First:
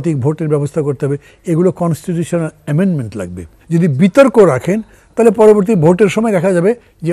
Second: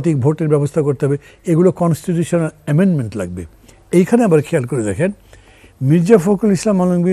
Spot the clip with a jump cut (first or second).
first